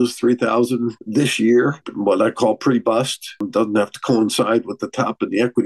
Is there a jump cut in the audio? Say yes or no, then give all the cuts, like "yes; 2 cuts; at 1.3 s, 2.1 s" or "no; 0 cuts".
yes; 3 cuts; at 1.0 s, 1.9 s, 3.5 s